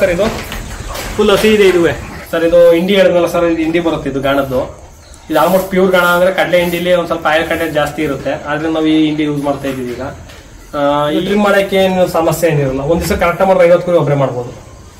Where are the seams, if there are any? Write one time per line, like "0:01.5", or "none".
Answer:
0:02.1
0:11.2